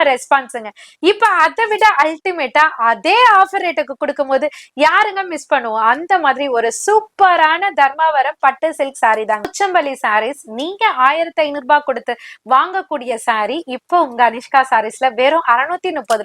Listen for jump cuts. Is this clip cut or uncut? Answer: cut